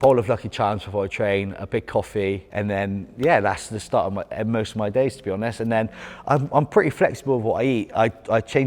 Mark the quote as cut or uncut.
uncut